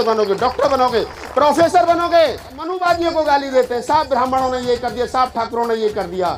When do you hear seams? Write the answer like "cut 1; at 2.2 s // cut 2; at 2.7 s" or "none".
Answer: cut 1; at 2.8 s